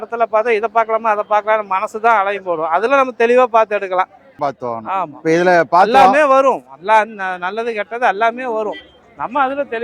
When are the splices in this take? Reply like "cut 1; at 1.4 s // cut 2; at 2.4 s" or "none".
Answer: cut 1; at 4.5 s